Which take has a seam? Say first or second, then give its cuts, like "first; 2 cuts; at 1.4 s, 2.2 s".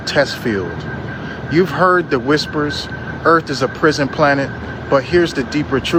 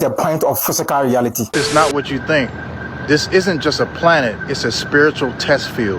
second; 1 cut; at 1.5 s